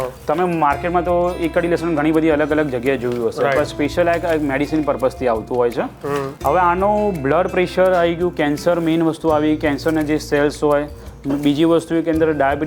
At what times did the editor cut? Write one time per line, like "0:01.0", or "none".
0:06.3